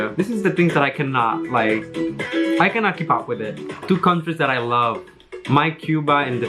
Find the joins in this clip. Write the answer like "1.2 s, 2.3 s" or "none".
3.8 s